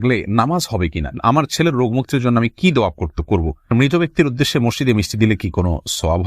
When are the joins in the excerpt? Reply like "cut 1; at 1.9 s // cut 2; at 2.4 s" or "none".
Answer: cut 1; at 1.1 s // cut 2; at 3.7 s